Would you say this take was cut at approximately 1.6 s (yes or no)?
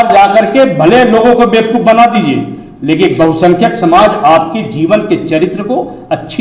no